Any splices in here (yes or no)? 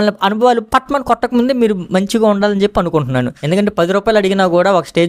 yes